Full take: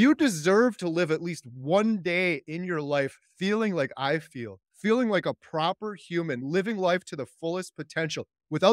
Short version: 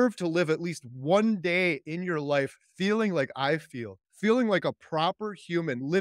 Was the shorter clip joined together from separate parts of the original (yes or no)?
no